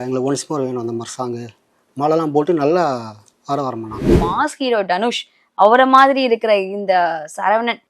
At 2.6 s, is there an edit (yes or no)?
no